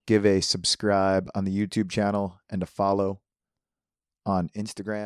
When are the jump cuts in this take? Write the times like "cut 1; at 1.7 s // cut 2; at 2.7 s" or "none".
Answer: none